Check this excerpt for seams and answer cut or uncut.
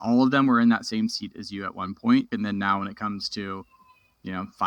cut